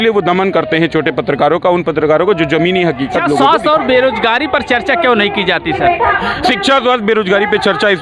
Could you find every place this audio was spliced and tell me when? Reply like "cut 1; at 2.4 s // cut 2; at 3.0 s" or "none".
cut 1; at 3.4 s